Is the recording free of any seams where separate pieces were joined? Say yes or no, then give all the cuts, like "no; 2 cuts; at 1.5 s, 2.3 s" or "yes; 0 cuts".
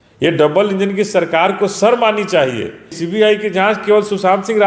no; 1 cut; at 3.0 s